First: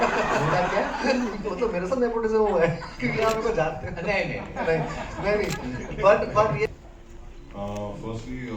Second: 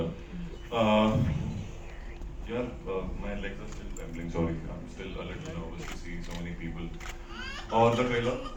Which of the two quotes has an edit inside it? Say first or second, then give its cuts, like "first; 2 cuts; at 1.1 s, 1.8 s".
first; 1 cut; at 6.7 s